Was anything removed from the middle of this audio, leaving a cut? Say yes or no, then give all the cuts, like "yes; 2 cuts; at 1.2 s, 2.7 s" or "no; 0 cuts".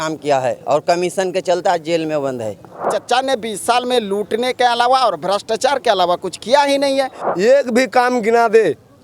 yes; 2 cuts; at 3.0 s, 7.2 s